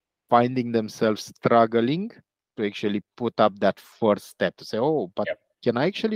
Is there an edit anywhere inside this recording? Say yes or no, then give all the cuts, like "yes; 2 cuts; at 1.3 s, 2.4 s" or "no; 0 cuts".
no; 0 cuts